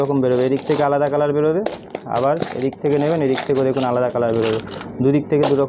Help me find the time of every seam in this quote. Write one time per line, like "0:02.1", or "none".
none